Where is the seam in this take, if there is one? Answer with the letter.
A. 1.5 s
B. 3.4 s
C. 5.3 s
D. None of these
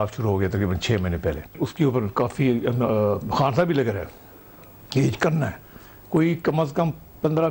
A